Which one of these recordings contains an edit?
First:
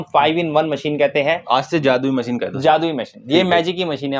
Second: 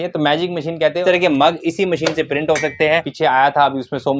second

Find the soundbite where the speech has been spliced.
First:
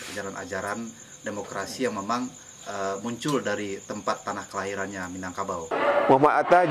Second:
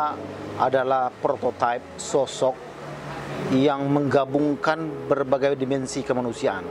first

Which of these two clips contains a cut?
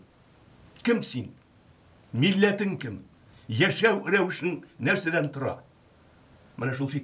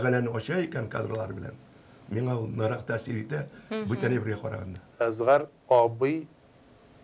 second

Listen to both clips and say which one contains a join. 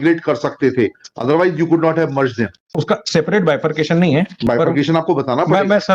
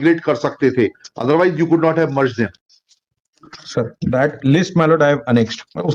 first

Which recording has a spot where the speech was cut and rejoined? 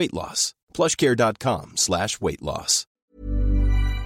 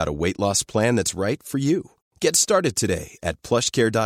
first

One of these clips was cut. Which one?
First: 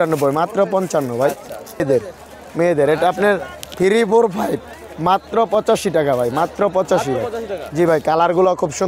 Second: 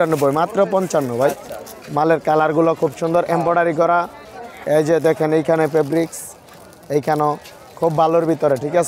first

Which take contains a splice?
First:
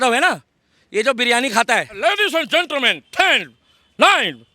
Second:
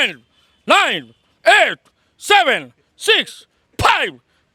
first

